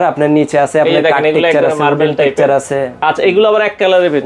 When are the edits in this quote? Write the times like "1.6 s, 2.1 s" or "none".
none